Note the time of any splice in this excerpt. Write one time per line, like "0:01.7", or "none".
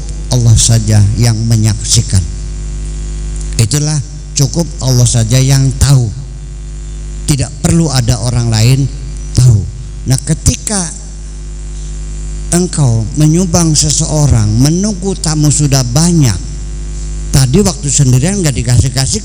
none